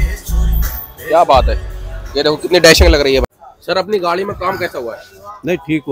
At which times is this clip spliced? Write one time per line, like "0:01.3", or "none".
0:03.3